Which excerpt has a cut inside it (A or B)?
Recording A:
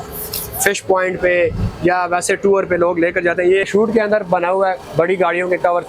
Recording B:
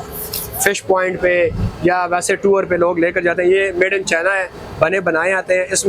A